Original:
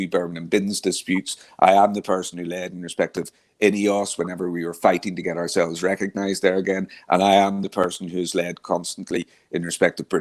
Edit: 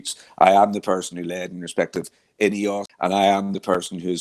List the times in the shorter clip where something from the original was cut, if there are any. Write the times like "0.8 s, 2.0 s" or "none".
2.9 s